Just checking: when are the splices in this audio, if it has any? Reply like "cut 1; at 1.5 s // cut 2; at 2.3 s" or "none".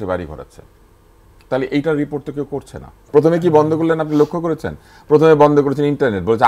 cut 1; at 3.0 s